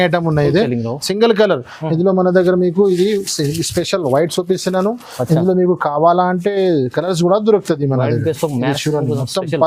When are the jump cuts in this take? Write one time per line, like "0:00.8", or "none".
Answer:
none